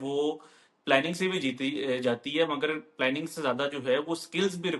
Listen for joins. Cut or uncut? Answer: uncut